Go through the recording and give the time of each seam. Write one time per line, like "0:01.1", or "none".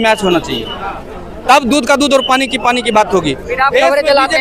none

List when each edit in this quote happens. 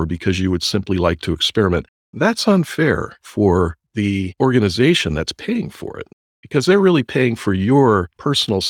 none

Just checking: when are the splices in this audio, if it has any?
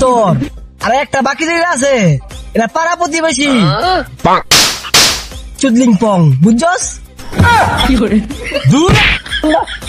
none

